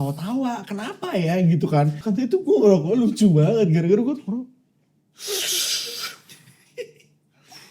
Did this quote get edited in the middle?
yes; 1 cut; at 2.0 s

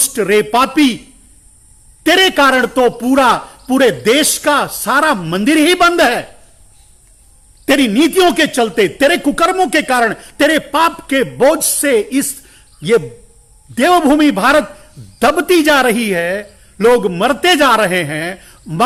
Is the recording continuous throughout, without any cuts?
yes; 0 cuts

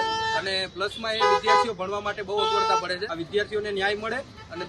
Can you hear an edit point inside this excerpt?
yes; 1 cut; at 3.1 s

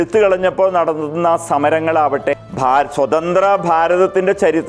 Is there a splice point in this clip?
yes; 1 cut; at 2.5 s

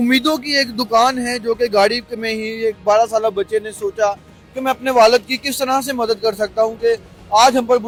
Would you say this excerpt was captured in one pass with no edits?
yes; 0 cuts

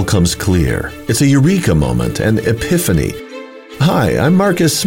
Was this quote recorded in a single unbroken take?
yes; 0 cuts

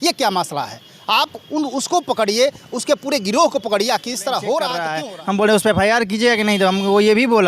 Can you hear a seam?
yes; 1 cut; at 4.9 s

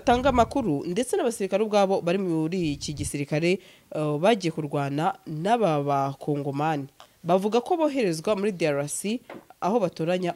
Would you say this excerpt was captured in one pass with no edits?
yes; 0 cuts

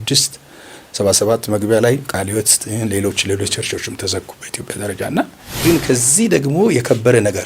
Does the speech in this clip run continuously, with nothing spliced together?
no; 1 cut; at 5.4 s

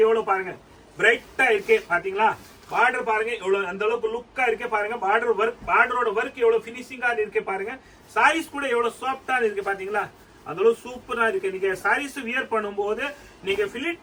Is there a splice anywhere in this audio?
no; 0 cuts

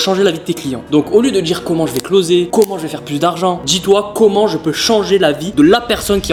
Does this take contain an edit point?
no; 0 cuts

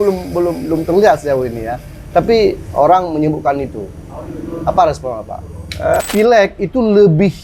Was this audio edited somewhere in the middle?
yes; 1 cut; at 6.0 s

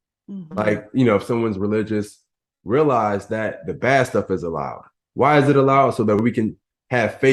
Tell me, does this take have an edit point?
no; 0 cuts

